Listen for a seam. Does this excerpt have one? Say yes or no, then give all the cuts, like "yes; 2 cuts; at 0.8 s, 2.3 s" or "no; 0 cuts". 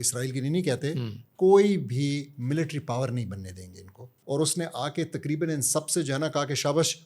yes; 1 cut; at 4.2 s